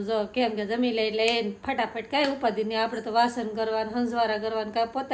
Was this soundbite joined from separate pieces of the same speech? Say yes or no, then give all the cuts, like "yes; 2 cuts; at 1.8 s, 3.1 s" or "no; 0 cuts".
no; 0 cuts